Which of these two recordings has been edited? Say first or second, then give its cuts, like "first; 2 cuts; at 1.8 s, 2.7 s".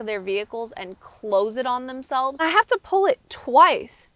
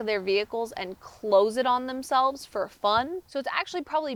first; 1 cut; at 2.4 s